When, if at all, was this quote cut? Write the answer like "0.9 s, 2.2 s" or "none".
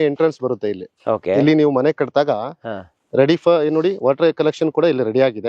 none